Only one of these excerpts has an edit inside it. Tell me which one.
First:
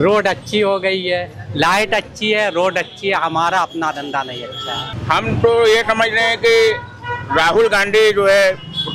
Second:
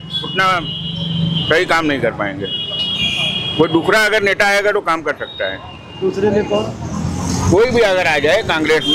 first; 1 cut; at 4.9 s

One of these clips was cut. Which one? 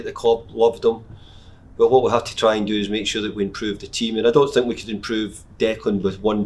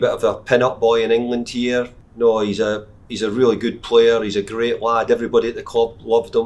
second; 1 cut; at 2.0 s

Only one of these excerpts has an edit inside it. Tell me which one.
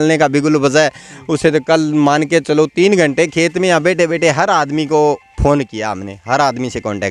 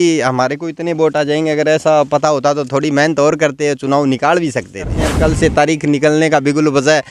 second; 1 cut; at 5.0 s

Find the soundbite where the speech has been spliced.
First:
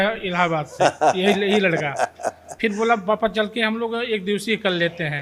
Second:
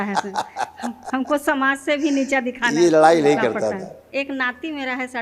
second; 1 cut; at 4.0 s

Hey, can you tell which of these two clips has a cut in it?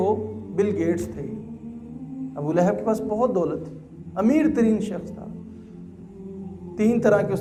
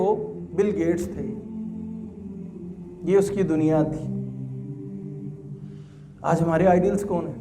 second; 4 cuts; at 1.0 s, 2.9 s, 4.5 s, 5.7 s

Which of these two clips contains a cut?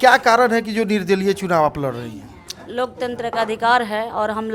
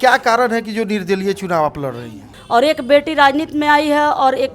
second; 1 cut; at 2.3 s

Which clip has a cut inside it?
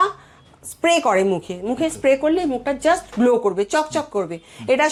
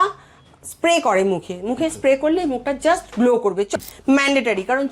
second; 1 cut; at 3.7 s

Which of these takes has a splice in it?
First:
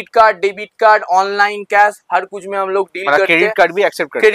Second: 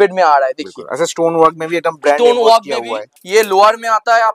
second; 1 cut; at 3.1 s

